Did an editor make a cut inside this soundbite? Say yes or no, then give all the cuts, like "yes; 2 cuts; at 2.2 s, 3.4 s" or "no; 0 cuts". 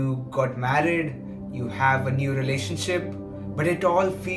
no; 0 cuts